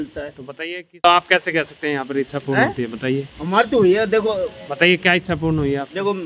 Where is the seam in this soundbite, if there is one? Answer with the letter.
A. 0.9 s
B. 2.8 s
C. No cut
A